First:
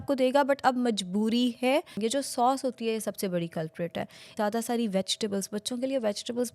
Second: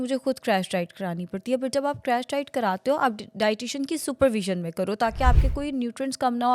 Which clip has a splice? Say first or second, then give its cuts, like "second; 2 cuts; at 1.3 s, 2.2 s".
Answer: first; 2 cuts; at 1.9 s, 4.3 s